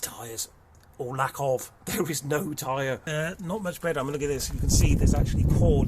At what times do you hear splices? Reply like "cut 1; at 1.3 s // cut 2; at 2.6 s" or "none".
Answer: cut 1; at 3.0 s